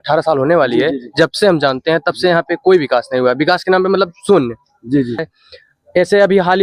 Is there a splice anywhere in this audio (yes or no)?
yes